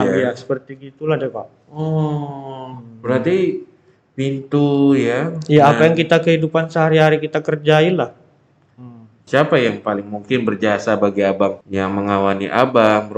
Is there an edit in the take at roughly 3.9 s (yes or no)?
no